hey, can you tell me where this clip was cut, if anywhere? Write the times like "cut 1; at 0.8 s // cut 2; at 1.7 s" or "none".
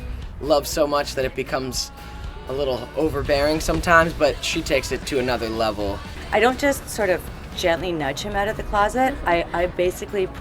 cut 1; at 6.2 s